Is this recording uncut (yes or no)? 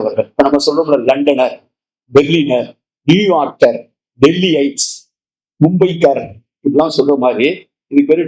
yes